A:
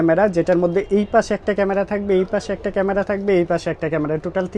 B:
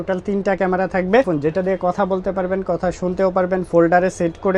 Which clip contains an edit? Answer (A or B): B